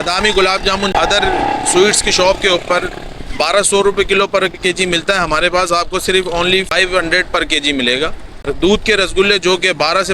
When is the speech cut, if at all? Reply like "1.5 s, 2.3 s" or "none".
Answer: 0.9 s, 6.7 s, 8.3 s

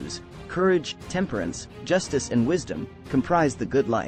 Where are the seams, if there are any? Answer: none

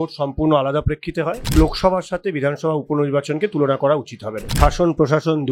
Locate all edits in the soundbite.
1.5 s, 4.5 s

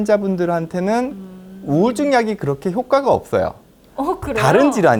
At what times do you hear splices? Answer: none

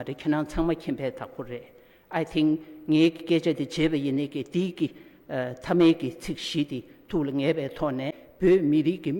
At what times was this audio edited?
8.2 s

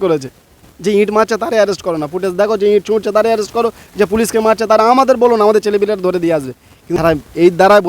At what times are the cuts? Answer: 7.0 s

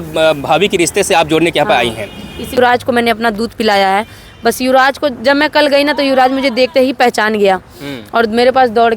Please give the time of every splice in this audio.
2.5 s

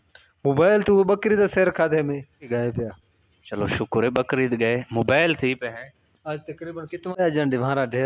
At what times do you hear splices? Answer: 2.5 s, 7.1 s

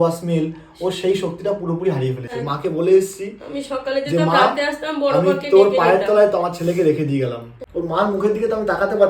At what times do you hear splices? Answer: 2.3 s, 7.6 s

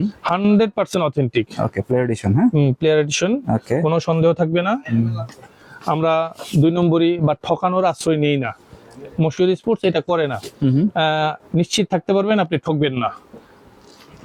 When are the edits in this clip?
none

